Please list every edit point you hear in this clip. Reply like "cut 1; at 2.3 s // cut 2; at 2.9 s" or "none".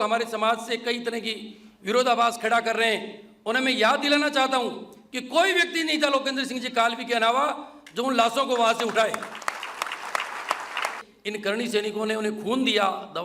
cut 1; at 11.0 s